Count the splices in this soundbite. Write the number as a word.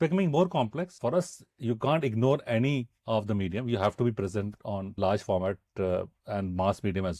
three